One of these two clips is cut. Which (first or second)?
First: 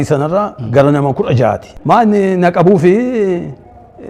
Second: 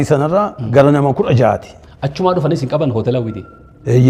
first